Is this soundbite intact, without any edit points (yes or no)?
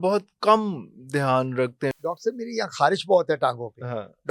no